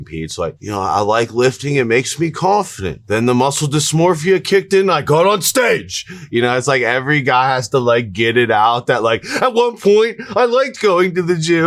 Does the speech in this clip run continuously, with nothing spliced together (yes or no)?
yes